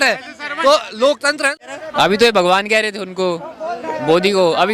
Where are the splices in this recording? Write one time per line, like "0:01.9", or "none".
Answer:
0:01.5